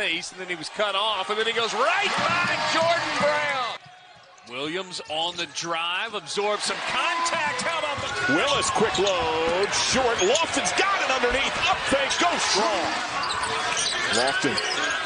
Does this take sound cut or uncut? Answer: uncut